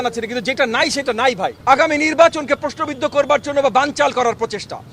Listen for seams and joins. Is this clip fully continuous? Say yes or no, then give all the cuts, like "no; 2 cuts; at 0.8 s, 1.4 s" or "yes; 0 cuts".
no; 1 cut; at 1.5 s